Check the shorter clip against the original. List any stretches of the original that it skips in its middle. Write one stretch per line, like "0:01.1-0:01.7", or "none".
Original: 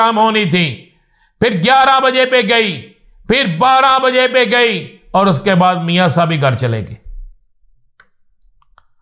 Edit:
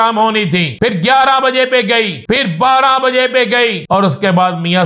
0:00.9-0:01.5
0:03.0-0:03.4
0:04.8-0:05.0